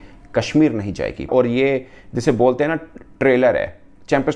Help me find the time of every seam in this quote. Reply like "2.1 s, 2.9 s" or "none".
1.3 s